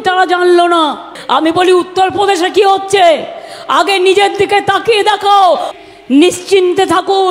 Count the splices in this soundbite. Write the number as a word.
two